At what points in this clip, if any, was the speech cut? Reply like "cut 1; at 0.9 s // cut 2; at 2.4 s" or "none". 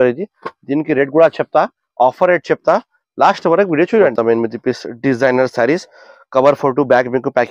cut 1; at 4.1 s